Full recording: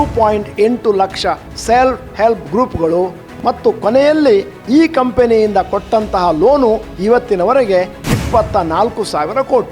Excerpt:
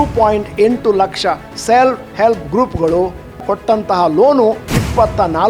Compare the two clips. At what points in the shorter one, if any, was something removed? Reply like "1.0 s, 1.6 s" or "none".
3.4 s, 4.6 s